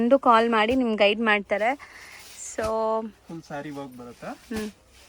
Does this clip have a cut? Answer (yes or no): no